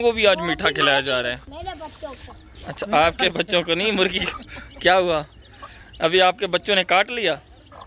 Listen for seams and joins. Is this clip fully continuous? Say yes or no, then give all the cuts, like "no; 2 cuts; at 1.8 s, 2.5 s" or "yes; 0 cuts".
yes; 0 cuts